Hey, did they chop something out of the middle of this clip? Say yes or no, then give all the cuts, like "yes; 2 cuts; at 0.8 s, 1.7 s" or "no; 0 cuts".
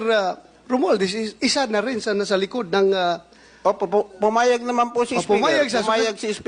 no; 0 cuts